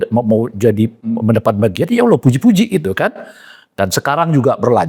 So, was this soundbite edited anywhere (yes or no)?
no